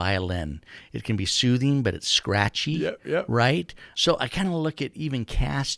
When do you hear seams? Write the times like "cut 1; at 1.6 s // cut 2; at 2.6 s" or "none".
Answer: cut 1; at 3.8 s